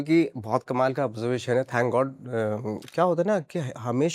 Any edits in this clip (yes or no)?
yes